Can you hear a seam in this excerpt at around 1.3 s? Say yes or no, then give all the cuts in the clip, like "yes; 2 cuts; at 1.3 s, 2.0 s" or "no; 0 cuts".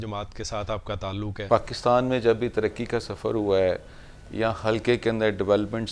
yes; 1 cut; at 1.3 s